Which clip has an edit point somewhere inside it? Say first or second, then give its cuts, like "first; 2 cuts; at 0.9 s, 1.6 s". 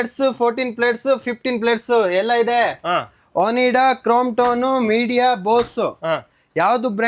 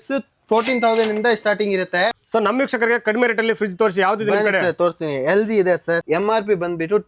second; 2 cuts; at 2.2 s, 6.0 s